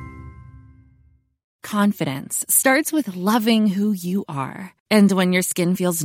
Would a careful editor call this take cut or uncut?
cut